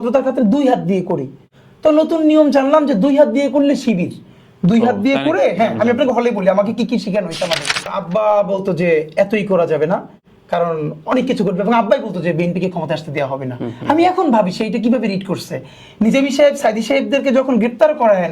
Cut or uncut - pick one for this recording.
cut